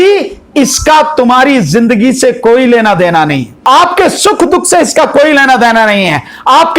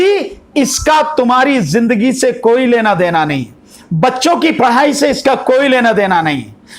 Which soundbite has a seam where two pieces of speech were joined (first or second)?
first